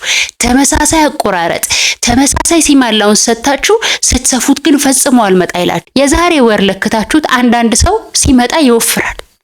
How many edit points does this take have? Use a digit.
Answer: 1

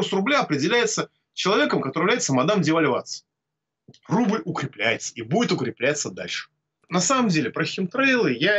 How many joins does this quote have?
1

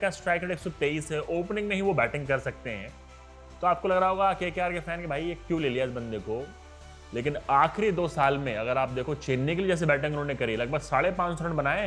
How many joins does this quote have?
0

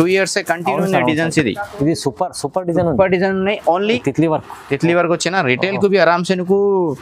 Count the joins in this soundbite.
1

